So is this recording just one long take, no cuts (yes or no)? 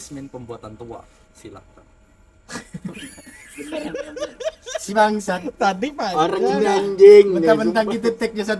yes